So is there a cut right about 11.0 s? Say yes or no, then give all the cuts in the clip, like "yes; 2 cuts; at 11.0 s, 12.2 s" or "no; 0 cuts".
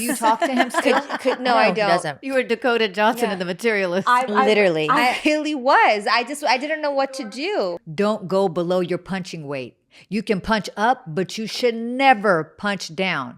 no; 2 cuts; at 2.2 s, 7.8 s